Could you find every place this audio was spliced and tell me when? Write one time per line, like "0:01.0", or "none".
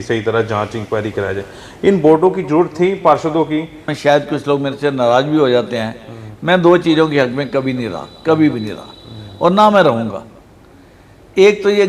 0:03.9